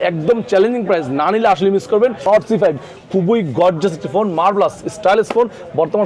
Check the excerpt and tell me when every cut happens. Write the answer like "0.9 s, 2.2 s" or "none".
2.2 s